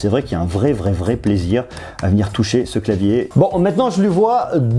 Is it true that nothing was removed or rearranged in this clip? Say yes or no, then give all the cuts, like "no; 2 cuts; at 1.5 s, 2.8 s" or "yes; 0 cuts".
no; 1 cut; at 3.3 s